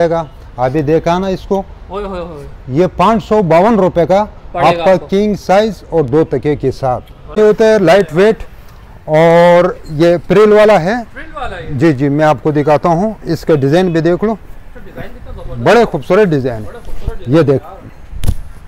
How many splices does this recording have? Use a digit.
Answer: 1